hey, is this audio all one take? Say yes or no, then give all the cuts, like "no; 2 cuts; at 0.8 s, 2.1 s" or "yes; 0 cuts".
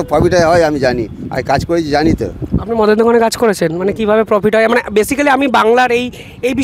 yes; 0 cuts